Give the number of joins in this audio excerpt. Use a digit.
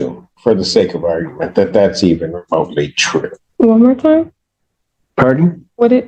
1